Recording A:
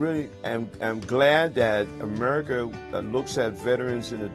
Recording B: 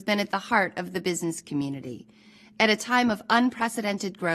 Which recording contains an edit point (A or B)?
A